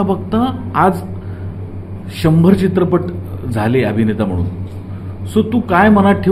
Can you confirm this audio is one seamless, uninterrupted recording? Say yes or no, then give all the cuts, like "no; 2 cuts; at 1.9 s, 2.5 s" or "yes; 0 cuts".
yes; 0 cuts